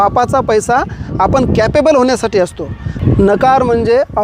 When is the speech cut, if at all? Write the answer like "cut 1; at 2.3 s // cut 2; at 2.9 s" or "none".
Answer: cut 1; at 3.0 s